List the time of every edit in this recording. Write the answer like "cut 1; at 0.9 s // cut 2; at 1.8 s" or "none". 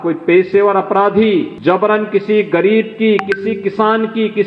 cut 1; at 1.5 s